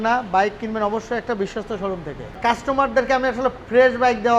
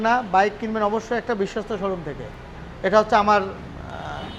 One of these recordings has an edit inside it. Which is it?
first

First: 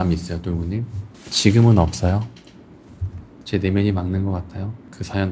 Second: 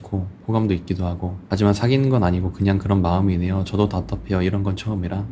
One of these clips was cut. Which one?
first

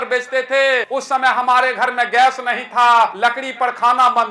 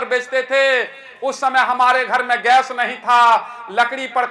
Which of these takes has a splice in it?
first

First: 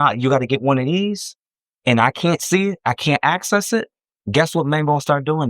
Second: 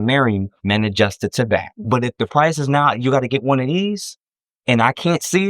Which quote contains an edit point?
second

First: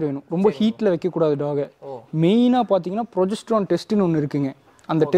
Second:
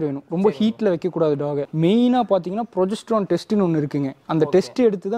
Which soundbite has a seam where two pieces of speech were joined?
second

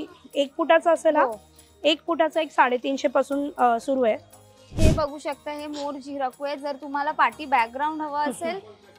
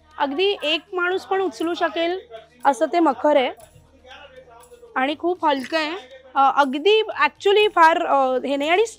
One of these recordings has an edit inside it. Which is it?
first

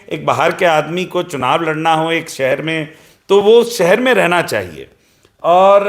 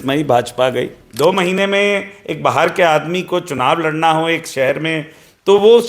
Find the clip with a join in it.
second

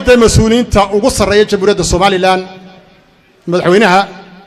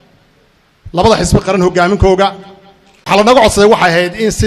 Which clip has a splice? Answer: second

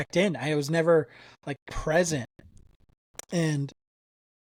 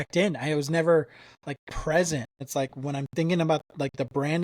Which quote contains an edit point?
second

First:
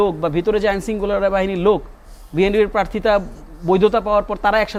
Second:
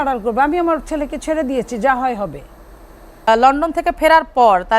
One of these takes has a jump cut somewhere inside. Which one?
second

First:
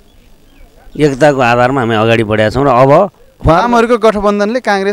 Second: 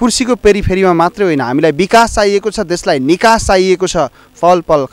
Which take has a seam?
first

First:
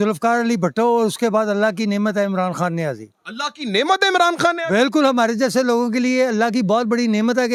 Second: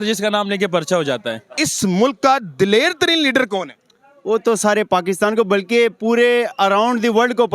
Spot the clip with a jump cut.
second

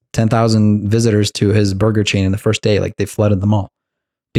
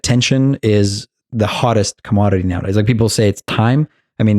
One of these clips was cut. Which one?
second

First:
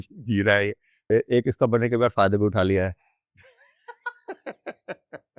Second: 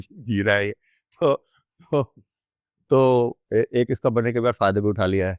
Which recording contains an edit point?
first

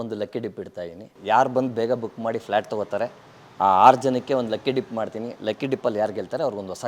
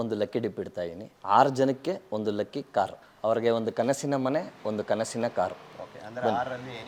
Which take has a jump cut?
first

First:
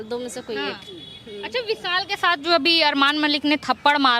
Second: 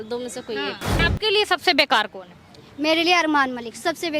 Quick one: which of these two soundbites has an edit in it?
second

